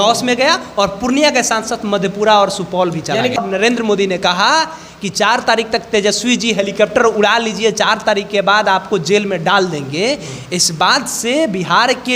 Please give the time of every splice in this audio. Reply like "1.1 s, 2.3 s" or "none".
3.4 s